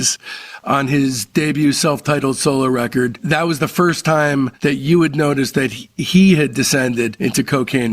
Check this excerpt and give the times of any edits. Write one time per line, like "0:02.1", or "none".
0:03.2
0:04.5